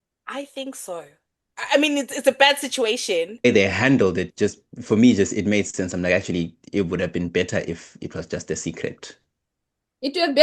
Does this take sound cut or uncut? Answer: cut